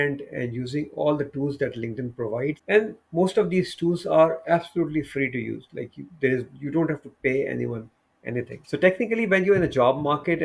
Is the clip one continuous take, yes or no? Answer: no